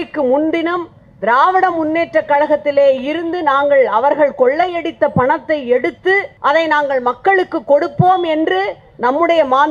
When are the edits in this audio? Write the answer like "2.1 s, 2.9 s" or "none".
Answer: 6.3 s